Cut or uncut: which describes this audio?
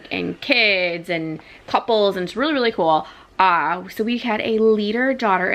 uncut